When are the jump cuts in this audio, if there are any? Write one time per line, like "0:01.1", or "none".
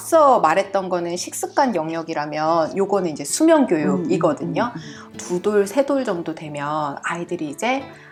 none